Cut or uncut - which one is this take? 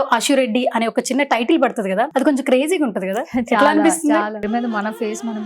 cut